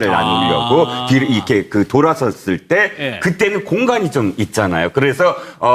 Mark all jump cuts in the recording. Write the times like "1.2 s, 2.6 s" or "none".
3.9 s